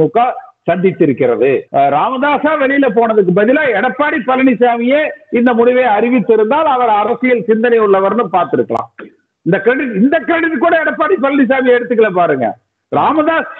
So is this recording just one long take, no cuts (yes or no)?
no